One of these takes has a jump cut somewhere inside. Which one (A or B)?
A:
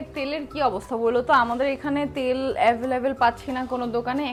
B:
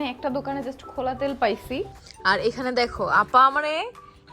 B